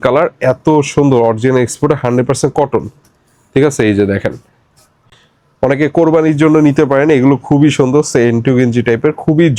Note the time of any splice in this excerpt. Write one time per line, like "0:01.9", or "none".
none